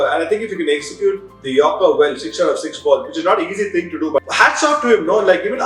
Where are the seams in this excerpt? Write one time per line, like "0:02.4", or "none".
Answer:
0:04.2